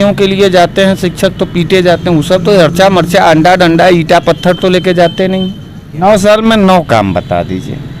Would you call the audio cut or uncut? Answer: cut